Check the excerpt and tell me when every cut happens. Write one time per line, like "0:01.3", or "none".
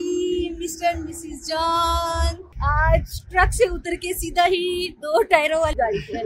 0:02.4